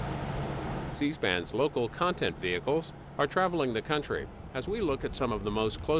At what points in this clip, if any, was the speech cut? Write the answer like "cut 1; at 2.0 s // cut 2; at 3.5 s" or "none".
cut 1; at 0.9 s